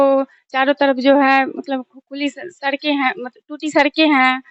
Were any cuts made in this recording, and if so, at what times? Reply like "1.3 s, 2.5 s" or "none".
none